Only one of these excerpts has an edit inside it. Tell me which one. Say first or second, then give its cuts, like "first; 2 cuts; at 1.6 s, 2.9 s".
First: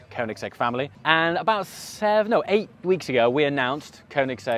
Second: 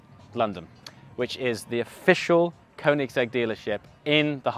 first; 1 cut; at 0.9 s